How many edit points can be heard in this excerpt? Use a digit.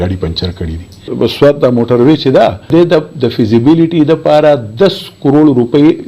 2